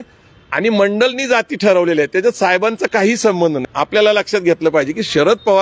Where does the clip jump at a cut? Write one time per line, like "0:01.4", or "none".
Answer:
0:03.6